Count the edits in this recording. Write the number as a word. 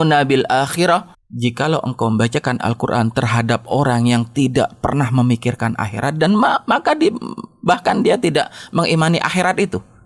one